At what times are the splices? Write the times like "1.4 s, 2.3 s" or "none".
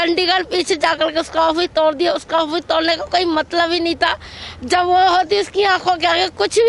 none